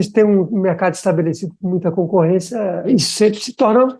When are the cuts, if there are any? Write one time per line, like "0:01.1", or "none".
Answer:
0:02.9